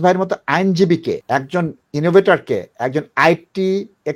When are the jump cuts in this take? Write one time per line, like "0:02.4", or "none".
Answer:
0:01.2

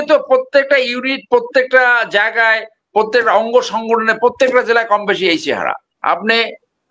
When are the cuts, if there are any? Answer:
0:05.9

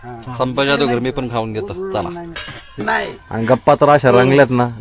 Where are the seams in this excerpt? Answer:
0:02.8

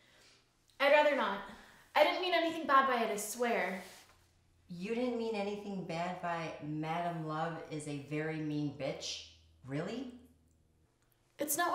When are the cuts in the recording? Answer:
0:06.0

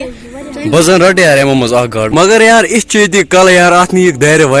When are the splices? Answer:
0:02.1

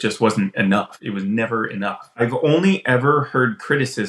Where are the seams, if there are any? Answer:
0:01.0
0:02.2

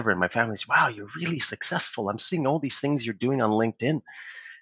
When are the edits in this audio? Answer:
none

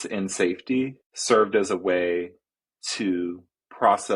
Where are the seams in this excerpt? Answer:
0:01.1

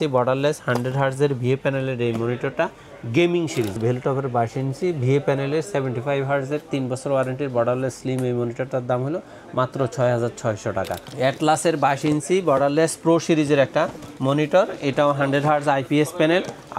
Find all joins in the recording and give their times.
0:03.8
0:11.0

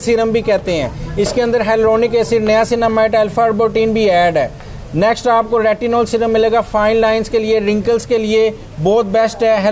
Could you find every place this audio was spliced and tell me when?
none

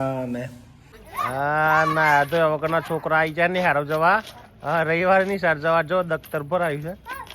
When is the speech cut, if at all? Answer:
0:01.1

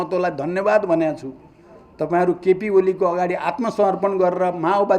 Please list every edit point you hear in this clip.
none

